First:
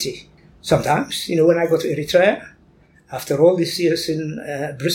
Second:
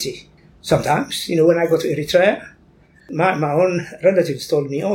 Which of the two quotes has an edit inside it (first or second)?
second